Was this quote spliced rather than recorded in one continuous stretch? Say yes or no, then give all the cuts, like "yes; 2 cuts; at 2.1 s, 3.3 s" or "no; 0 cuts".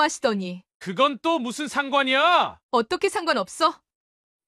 no; 0 cuts